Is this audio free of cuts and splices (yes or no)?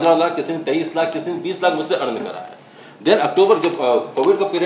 yes